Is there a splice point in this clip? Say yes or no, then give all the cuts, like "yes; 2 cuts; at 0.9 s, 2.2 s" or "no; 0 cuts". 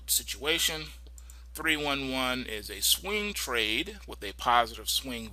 yes; 1 cut; at 4.0 s